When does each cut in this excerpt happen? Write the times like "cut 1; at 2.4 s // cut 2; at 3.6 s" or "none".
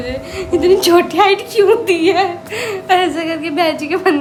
none